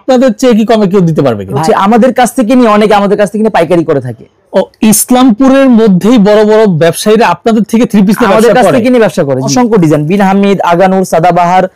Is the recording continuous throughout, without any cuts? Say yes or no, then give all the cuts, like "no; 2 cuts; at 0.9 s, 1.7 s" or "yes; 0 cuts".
no; 2 cuts; at 1.6 s, 9.5 s